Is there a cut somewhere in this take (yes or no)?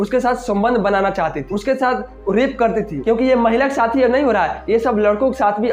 yes